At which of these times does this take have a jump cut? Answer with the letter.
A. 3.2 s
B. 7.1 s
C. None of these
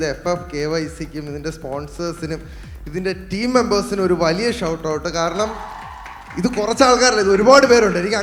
C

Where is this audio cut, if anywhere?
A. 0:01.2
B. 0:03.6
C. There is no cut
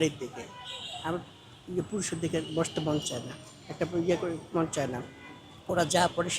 C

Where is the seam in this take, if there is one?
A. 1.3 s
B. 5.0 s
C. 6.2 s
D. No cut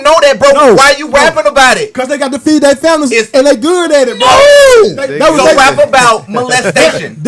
D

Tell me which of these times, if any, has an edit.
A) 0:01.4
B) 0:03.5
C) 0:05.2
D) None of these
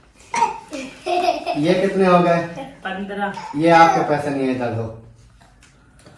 B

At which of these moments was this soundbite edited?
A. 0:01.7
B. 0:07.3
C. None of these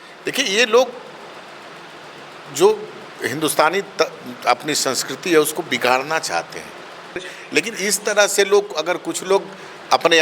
B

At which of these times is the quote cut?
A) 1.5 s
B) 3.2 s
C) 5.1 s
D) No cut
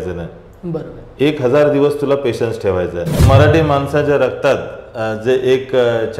B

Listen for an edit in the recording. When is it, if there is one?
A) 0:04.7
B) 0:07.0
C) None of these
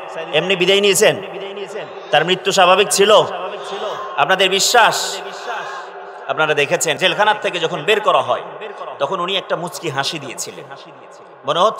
B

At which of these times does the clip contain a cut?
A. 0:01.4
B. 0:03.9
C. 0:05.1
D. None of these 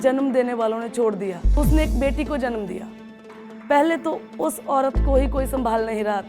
A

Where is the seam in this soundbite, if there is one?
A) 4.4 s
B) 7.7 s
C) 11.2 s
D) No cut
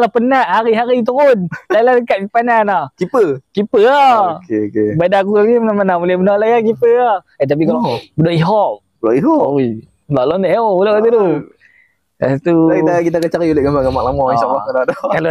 B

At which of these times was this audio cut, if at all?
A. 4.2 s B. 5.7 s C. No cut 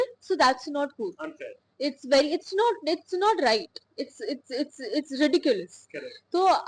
C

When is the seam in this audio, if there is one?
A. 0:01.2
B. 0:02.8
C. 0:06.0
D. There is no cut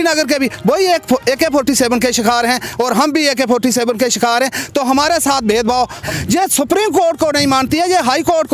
C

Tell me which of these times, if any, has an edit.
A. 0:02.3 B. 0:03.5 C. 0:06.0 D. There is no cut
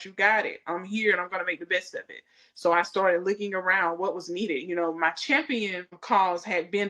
C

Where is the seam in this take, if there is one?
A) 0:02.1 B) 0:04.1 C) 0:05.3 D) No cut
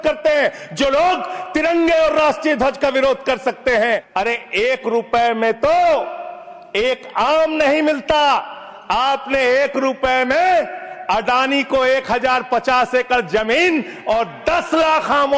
B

